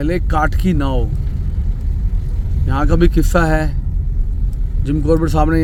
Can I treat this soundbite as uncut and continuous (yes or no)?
yes